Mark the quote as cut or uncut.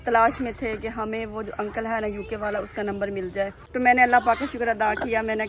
cut